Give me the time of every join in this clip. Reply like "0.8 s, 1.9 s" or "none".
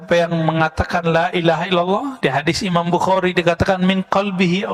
none